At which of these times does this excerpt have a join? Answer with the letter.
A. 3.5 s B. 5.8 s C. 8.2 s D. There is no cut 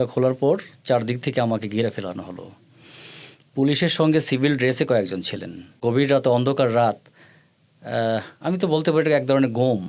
B